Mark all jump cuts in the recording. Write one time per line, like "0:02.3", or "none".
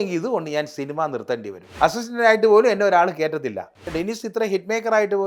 0:01.7
0:03.9